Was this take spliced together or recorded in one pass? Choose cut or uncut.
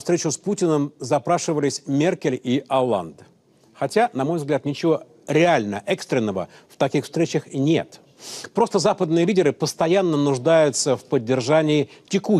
cut